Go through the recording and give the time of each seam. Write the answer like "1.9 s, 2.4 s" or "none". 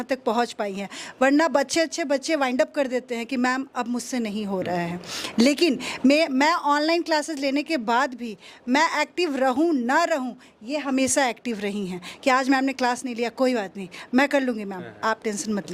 none